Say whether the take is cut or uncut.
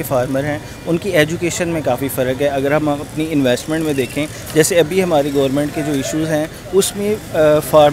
uncut